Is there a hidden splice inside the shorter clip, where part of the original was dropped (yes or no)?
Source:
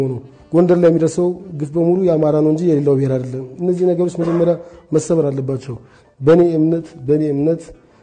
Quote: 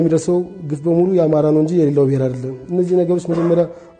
no